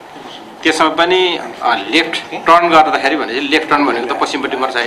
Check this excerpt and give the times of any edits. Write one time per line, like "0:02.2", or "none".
none